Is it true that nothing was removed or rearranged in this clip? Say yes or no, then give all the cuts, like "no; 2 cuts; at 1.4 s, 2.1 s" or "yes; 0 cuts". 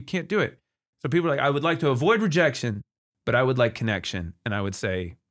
yes; 0 cuts